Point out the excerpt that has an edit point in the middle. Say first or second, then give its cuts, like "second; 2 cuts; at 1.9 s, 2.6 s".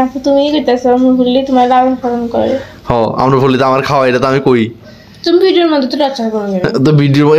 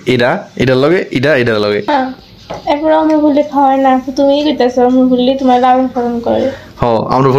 second; 1 cut; at 1.9 s